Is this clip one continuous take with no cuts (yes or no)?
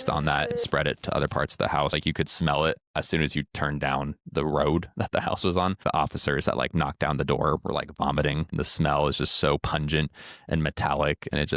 no